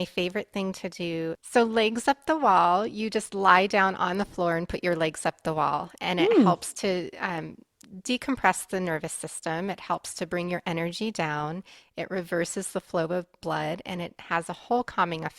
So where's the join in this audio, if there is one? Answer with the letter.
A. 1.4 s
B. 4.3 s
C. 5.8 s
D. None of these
A